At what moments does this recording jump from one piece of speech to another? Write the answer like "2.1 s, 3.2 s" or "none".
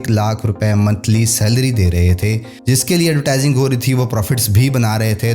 2.5 s